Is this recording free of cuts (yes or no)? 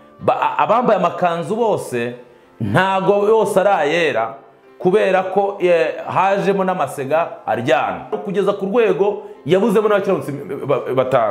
no